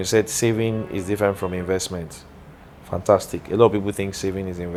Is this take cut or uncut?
uncut